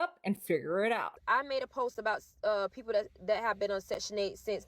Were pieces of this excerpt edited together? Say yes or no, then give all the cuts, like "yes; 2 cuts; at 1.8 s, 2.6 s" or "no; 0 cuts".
yes; 1 cut; at 1.2 s